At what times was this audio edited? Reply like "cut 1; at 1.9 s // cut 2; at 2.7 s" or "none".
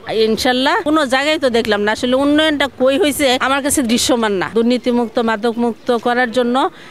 cut 1; at 0.8 s // cut 2; at 3.4 s // cut 3; at 4.5 s